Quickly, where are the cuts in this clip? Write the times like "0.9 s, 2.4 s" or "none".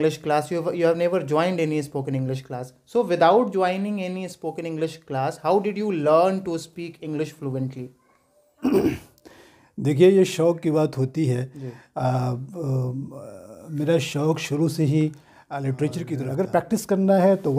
16.2 s